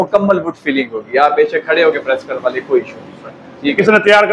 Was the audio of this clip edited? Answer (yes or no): no